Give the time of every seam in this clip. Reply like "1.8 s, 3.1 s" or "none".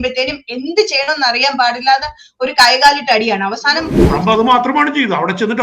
4.0 s